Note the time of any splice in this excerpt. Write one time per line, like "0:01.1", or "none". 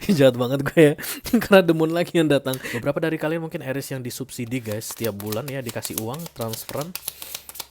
0:02.7